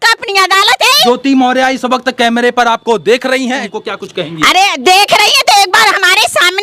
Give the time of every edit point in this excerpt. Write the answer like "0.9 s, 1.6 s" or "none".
1.1 s, 3.7 s